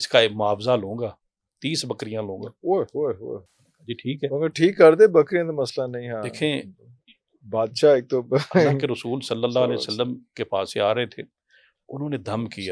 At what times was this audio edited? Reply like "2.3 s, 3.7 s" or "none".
none